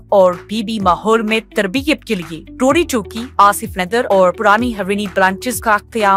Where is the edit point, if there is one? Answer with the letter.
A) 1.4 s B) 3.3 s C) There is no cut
C